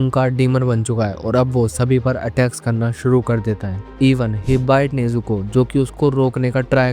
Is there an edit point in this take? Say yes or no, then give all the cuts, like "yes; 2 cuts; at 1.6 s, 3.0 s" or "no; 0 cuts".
no; 0 cuts